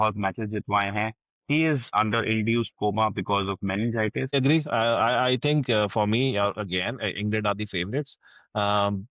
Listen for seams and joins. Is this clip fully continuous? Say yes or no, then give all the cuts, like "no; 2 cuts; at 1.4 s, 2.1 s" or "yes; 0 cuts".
no; 2 cuts; at 1.9 s, 4.3 s